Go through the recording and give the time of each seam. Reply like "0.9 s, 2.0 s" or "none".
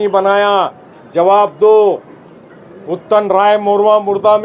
none